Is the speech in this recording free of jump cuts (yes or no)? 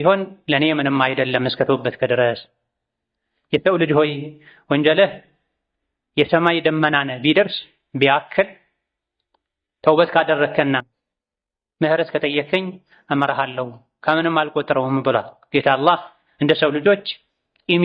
yes